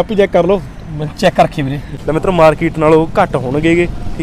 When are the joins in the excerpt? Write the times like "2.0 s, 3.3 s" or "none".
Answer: 2.0 s

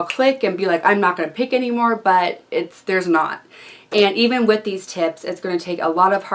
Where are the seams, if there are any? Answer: 1.0 s

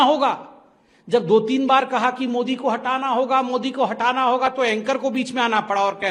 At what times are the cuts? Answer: none

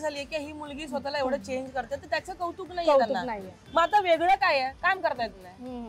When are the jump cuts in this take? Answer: none

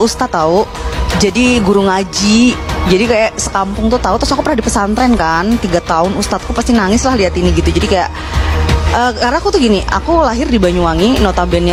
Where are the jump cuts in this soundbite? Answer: none

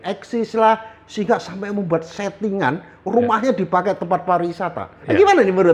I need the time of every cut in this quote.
none

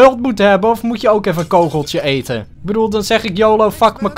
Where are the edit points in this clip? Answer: 2.5 s

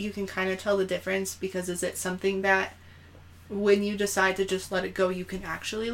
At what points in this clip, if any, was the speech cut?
none

